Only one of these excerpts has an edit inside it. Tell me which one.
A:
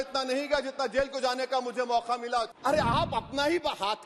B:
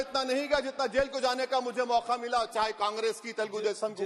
A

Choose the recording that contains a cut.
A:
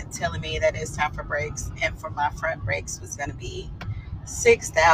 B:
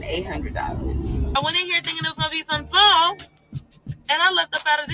B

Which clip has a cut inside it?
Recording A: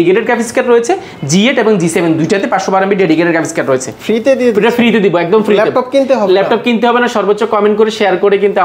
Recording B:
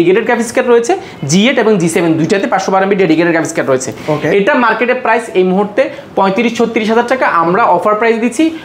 A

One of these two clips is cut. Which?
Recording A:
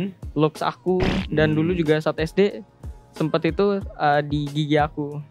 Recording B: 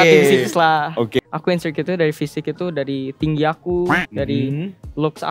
B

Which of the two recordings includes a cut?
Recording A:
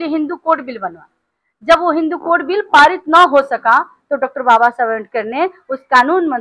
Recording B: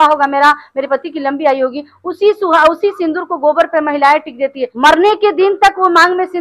B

